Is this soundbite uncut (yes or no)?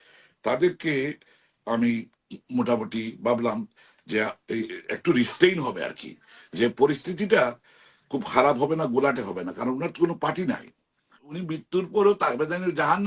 no